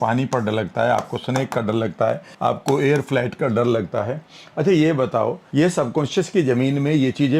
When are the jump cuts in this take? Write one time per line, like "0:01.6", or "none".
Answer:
0:02.3
0:05.4